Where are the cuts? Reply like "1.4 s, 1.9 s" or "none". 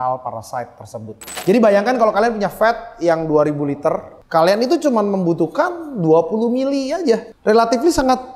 1.3 s, 4.2 s, 7.3 s